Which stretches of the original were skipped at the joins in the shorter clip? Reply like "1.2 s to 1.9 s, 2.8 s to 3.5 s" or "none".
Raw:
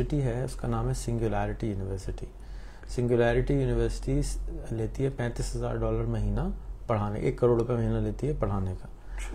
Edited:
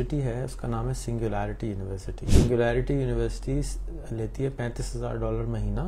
2.2 s to 2.8 s